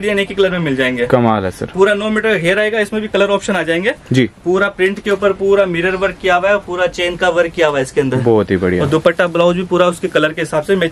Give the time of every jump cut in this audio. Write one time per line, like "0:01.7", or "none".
none